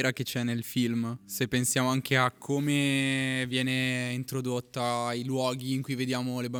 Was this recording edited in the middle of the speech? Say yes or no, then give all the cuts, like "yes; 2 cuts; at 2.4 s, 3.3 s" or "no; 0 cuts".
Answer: no; 0 cuts